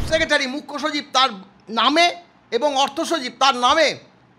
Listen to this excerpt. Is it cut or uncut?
uncut